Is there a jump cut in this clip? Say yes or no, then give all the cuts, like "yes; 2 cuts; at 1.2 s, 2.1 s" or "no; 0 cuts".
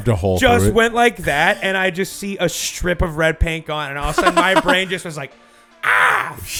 no; 0 cuts